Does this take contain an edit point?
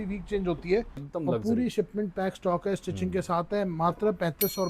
yes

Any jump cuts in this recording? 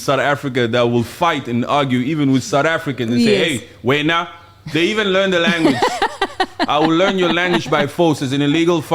no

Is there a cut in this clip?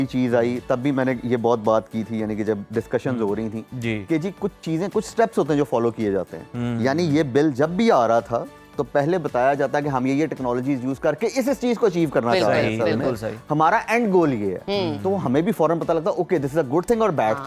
no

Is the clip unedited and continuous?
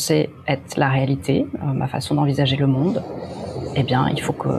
yes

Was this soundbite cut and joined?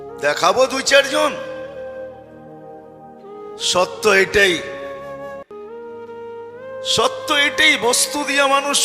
yes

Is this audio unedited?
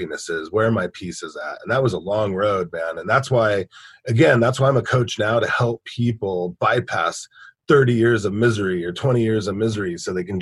yes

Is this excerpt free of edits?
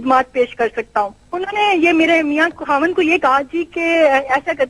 no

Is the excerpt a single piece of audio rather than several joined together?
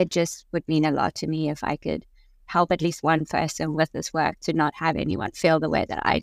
yes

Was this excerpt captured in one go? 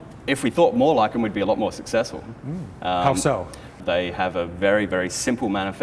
no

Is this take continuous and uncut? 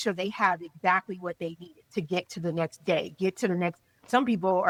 yes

